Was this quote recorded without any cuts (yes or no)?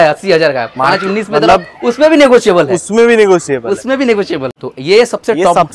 no